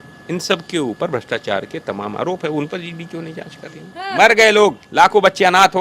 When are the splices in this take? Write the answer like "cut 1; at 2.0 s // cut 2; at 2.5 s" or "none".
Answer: cut 1; at 4.0 s